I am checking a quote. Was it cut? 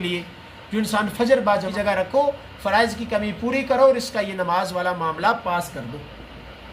yes; 1 cut; at 1.7 s

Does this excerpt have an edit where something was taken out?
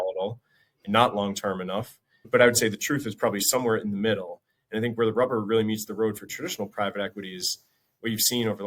yes; 1 cut; at 2.3 s

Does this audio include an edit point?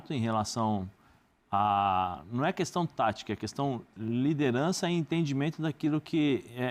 no; 0 cuts

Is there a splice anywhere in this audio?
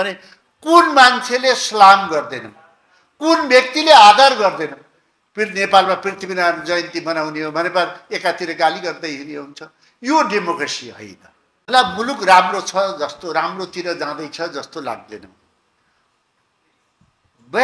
yes; 1 cut; at 11.7 s

